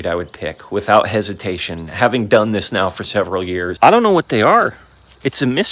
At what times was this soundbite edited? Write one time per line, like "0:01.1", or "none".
0:03.7

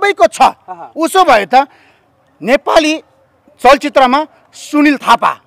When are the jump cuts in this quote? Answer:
none

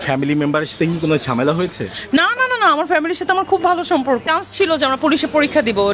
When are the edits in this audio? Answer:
0:04.2

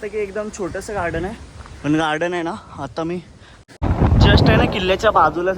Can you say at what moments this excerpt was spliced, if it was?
0:03.7

